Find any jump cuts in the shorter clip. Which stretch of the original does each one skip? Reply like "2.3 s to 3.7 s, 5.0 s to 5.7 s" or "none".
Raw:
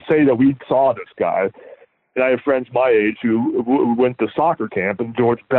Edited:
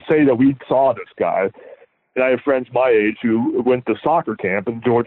3.6 s to 4.0 s